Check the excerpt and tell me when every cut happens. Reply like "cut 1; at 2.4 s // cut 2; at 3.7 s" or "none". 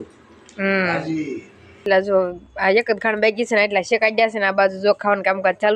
cut 1; at 1.8 s